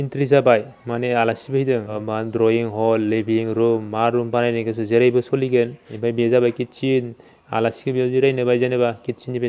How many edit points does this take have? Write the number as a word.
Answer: two